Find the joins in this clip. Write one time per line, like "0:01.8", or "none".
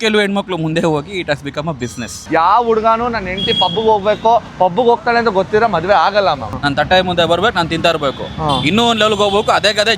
0:02.3
0:06.5

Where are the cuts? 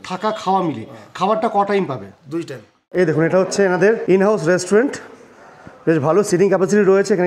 0:02.8
0:04.0

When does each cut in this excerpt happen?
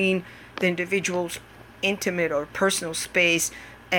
none

